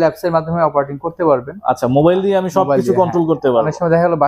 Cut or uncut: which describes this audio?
uncut